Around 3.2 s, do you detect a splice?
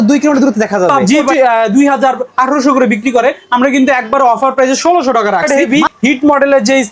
no; 2 cuts; at 1.3 s, 5.4 s

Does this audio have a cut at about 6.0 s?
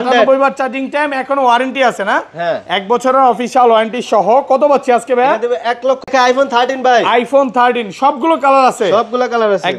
yes; 1 cut; at 6.0 s

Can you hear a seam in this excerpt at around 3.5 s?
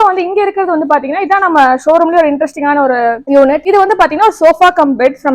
yes; 1 cut; at 3.5 s

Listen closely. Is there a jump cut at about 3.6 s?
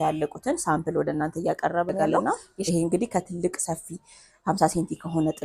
no; 1 cut; at 2.2 s

